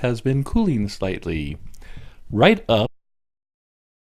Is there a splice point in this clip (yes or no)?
no